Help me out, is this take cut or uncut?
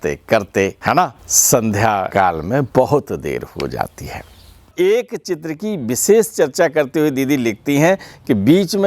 cut